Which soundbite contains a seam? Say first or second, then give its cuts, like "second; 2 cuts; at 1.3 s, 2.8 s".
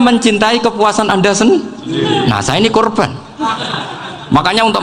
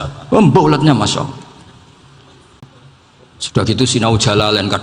second; 1 cut; at 2.6 s